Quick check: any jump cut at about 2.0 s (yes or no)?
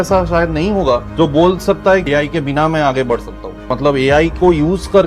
yes